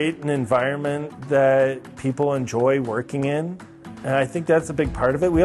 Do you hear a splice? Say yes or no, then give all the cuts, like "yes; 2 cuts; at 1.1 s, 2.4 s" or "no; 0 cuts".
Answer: no; 0 cuts